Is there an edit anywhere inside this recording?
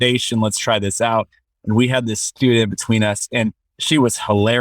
yes; 1 cut; at 3.7 s

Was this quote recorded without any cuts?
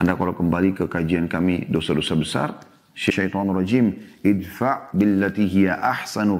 no; 1 cut; at 3.1 s

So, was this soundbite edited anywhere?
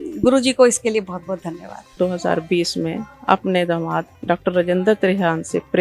yes; 1 cut; at 1.9 s

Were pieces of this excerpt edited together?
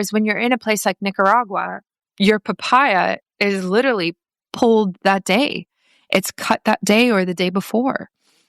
yes; 2 cuts; at 2.0 s, 4.4 s

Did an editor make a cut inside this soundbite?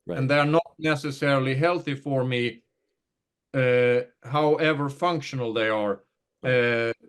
no; 0 cuts

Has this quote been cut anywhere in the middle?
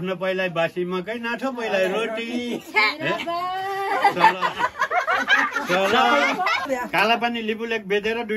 yes; 1 cut; at 6.7 s

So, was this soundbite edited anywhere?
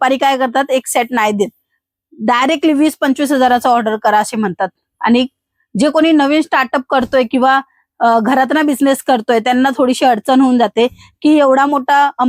no; 0 cuts

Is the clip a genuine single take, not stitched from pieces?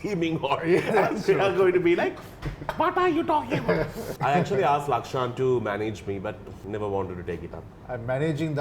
no; 3 cuts; at 4.0 s, 6.5 s, 7.7 s

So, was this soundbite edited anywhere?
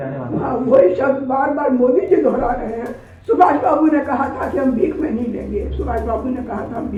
no; 0 cuts

